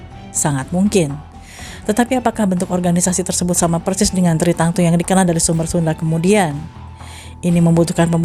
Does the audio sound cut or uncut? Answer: uncut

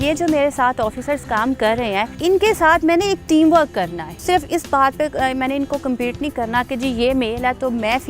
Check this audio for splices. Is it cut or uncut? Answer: cut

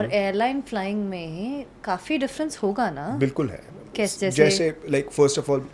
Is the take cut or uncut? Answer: uncut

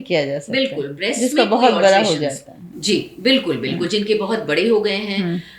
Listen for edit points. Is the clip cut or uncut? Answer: uncut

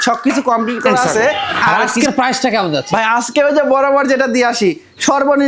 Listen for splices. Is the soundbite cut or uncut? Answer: cut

